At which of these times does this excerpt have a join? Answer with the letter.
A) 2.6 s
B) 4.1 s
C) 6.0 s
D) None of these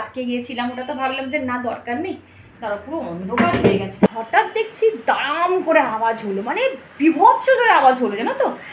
B